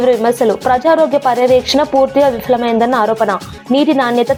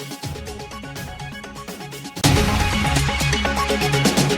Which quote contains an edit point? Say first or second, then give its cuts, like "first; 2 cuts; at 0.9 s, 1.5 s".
second; 2 cuts; at 0.9 s, 2.2 s